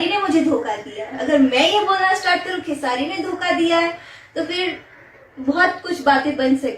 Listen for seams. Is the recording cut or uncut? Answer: uncut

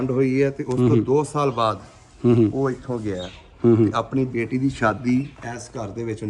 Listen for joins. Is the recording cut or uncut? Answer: uncut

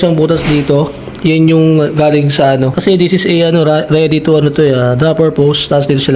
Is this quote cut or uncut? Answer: cut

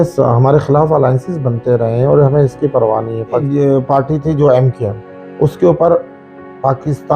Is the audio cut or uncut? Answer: cut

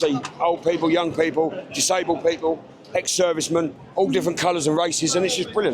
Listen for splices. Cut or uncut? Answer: cut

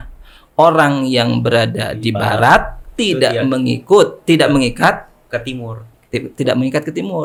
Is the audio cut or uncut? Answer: uncut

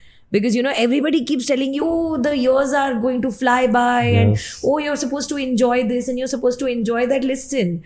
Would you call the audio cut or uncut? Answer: uncut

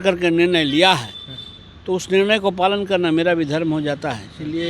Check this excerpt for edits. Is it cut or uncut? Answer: uncut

